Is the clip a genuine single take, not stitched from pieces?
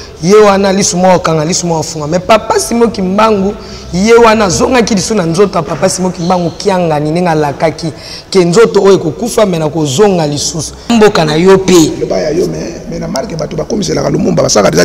no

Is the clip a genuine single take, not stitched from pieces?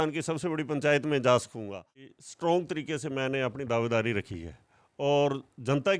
no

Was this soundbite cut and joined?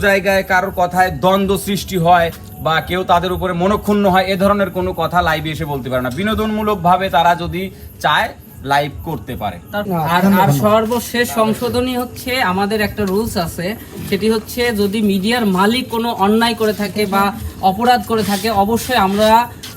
yes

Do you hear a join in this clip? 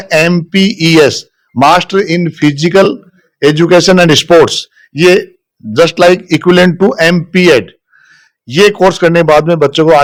no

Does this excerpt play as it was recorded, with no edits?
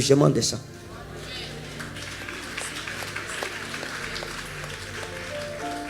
yes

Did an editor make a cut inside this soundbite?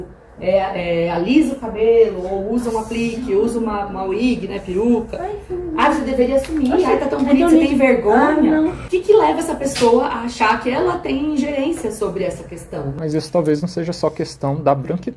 yes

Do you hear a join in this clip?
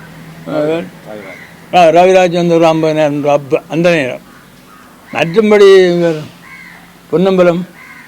no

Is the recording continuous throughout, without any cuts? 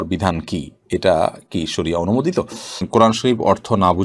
no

